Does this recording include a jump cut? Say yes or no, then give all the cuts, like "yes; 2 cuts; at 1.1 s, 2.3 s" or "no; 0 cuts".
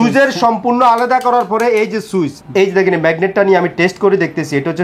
yes; 1 cut; at 2.3 s